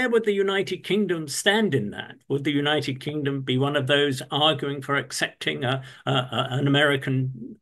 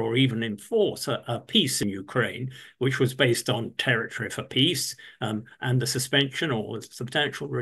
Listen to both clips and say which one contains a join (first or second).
second